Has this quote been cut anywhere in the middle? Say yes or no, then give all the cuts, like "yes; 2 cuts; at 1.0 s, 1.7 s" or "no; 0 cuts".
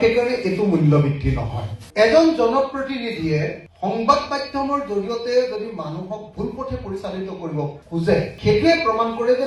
yes; 2 cuts; at 3.6 s, 8.3 s